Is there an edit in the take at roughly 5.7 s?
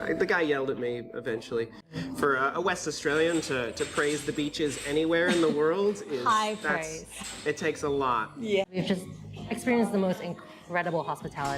no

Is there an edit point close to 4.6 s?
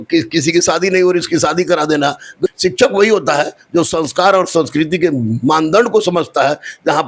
no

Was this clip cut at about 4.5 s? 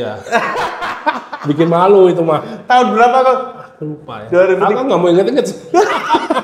no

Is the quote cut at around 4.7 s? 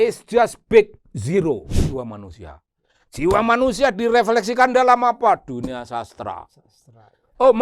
no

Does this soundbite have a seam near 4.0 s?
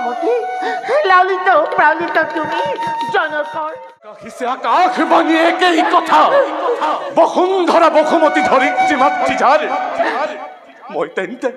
yes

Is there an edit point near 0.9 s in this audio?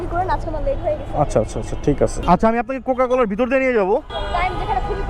no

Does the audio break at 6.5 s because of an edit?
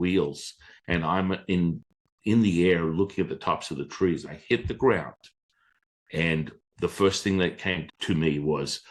no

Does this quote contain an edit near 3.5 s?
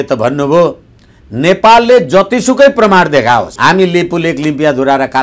yes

